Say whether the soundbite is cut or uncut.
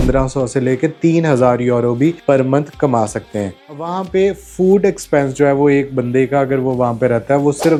uncut